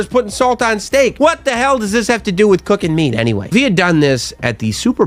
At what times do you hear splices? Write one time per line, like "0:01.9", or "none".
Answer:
none